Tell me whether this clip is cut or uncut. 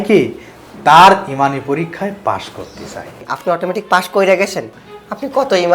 cut